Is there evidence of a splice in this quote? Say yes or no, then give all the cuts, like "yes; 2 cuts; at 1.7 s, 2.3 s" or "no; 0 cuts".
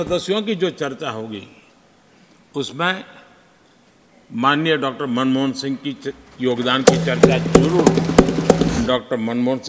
yes; 1 cut; at 8.7 s